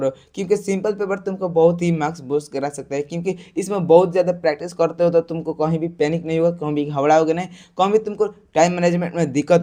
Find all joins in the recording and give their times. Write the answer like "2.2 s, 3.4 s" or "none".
none